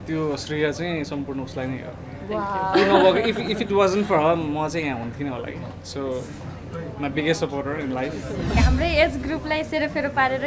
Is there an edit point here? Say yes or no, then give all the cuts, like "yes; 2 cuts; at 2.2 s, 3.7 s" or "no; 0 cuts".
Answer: yes; 1 cut; at 8.6 s